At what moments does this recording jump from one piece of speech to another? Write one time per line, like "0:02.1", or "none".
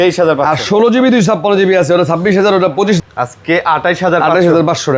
0:03.0